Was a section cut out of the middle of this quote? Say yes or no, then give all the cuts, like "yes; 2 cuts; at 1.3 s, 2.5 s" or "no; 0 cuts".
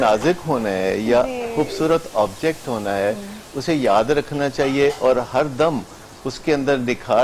no; 0 cuts